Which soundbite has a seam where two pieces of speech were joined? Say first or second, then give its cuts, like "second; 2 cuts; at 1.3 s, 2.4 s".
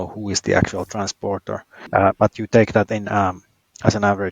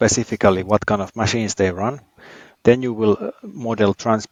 first; 1 cut; at 1.9 s